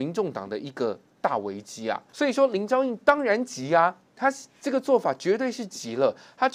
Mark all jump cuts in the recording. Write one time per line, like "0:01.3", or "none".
0:02.1